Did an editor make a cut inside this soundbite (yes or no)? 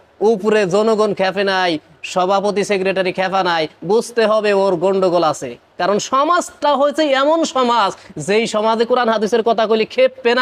no